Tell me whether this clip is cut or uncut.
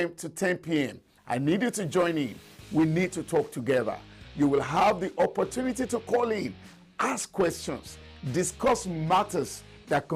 uncut